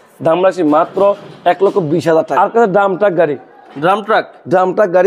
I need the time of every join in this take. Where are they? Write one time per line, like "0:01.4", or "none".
0:02.3